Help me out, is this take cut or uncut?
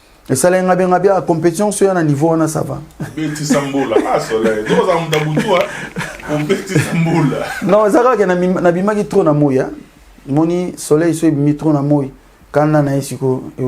uncut